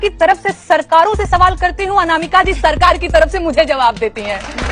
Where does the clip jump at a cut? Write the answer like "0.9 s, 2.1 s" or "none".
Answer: none